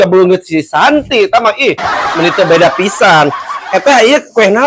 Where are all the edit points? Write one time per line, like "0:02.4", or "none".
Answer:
none